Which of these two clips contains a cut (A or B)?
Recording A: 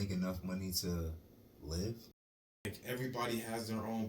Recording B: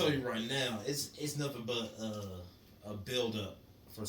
A